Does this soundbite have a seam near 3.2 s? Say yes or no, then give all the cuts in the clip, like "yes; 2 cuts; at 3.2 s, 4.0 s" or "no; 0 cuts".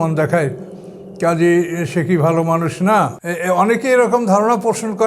yes; 1 cut; at 3.2 s